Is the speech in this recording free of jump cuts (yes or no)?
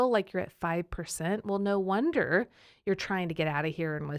yes